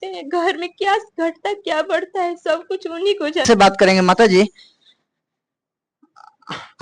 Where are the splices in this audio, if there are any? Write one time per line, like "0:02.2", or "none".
0:03.4